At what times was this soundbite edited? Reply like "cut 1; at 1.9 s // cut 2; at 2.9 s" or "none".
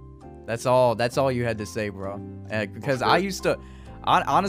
none